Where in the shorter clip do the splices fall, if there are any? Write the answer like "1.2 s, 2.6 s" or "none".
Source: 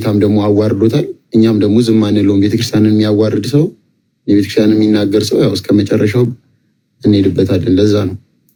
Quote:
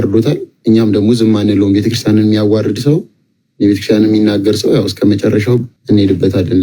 5.7 s